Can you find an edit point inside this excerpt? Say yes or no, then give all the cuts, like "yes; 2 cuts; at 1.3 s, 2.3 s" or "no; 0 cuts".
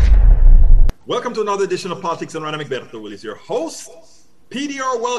no; 0 cuts